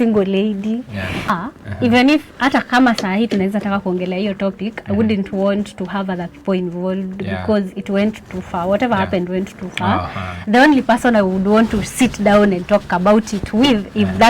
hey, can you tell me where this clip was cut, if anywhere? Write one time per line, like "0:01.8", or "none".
0:01.3